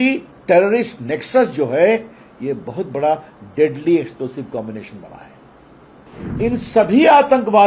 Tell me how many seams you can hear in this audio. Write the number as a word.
one